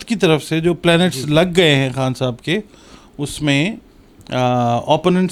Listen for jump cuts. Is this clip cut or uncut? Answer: uncut